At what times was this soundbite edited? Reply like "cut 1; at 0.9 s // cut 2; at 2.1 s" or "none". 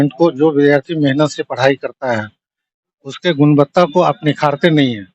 none